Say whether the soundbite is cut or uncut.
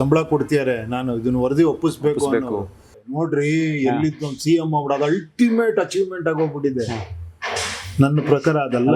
cut